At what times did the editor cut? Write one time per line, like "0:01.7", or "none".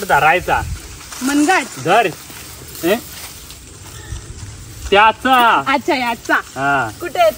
none